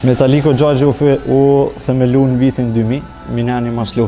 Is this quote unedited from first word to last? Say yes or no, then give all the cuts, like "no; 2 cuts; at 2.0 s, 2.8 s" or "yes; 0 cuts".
yes; 0 cuts